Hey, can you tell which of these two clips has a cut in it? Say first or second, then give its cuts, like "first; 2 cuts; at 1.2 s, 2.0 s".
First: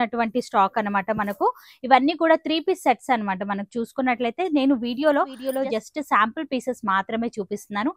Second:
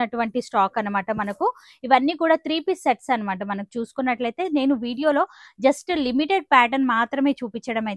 first; 1 cut; at 5.5 s